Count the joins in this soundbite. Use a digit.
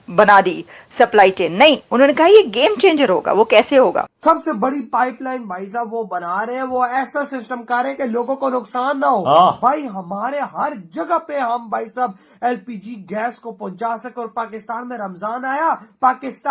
1